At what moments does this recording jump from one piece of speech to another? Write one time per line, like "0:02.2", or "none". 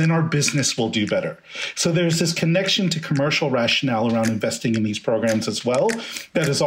none